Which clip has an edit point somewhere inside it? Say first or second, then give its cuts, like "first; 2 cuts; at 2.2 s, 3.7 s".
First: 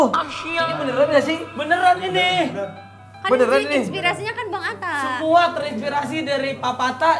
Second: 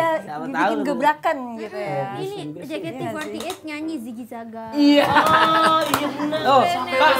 second; 2 cuts; at 2.2 s, 6.4 s